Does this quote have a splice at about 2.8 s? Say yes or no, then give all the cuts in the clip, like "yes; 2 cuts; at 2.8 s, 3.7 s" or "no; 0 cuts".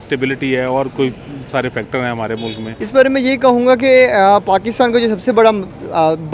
yes; 1 cut; at 2.8 s